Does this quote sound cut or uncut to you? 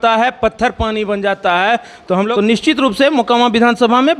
cut